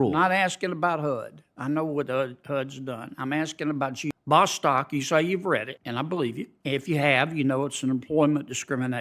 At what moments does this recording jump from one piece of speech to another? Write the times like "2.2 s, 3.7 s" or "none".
4.1 s, 5.8 s, 6.5 s